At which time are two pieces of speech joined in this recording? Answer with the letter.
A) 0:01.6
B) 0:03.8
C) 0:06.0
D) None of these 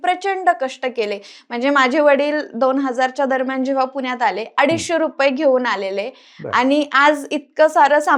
D